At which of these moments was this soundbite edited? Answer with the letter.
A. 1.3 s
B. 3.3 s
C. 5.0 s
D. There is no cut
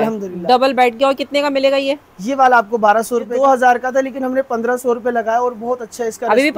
B